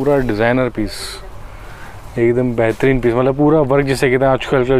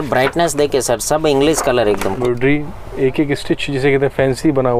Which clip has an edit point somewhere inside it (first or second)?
second